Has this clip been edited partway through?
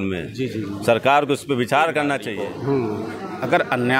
yes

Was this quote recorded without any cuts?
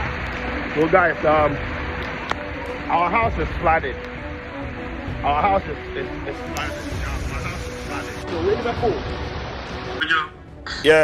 no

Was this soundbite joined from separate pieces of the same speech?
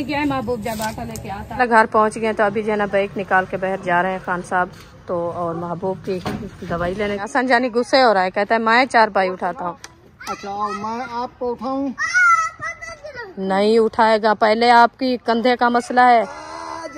yes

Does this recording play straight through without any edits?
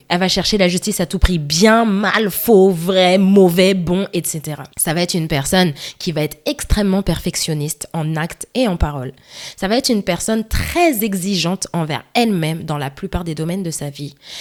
yes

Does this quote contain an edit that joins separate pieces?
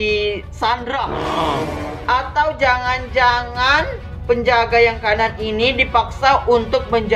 no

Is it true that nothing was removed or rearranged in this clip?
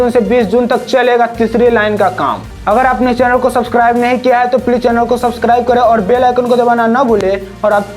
no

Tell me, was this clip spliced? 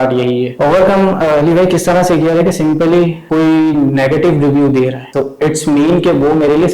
yes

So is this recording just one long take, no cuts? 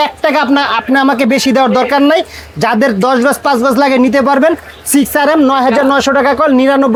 yes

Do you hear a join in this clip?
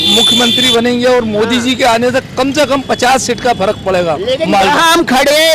no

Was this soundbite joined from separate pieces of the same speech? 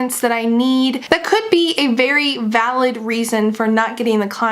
yes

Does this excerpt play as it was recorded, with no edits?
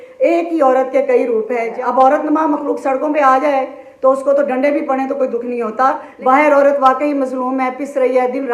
no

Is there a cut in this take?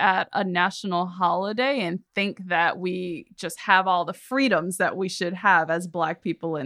no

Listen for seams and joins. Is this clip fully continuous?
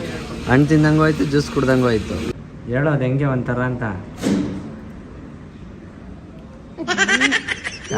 no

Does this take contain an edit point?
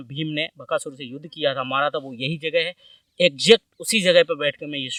no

